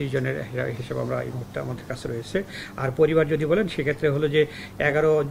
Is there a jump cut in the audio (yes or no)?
no